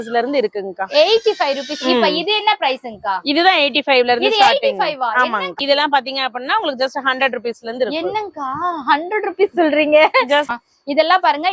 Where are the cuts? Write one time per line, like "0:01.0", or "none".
0:05.5
0:10.5

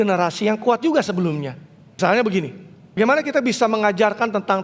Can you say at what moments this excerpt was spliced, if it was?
0:02.0
0:03.0

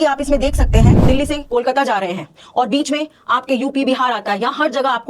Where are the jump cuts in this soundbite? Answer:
0:01.0

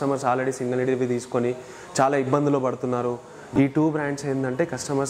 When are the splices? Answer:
0:03.6

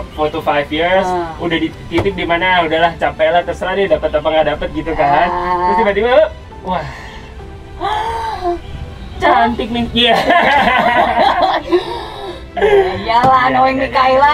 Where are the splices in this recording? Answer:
none

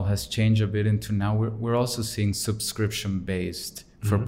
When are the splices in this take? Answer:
none

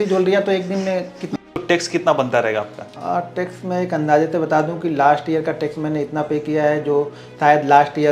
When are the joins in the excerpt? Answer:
0:01.3
0:02.8

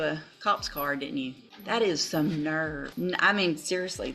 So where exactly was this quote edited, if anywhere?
0:01.5
0:02.9

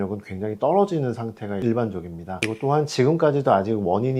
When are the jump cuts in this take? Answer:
0:02.4

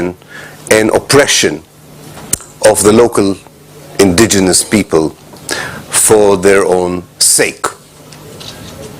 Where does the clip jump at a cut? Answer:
0:07.7

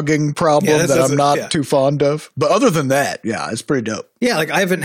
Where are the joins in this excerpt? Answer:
0:02.3

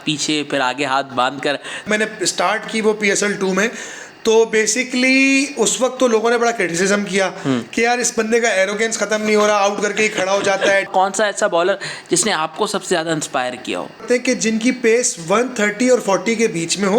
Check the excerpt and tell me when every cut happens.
0:01.8
0:10.9
0:14.0

